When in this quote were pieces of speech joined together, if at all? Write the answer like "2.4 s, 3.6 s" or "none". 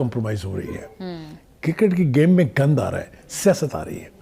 none